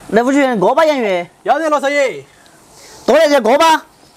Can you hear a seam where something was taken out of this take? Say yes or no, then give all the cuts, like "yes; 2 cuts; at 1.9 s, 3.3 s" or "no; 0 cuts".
no; 0 cuts